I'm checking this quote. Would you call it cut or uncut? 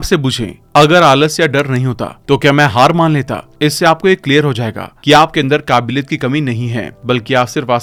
uncut